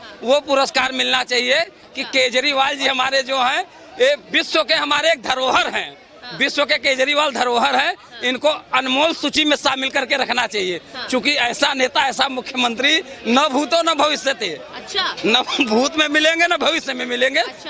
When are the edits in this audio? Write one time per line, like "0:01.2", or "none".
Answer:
none